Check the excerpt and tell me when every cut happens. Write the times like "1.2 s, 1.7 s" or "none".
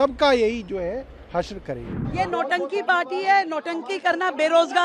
2.0 s